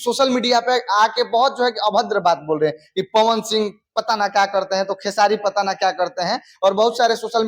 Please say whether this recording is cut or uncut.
uncut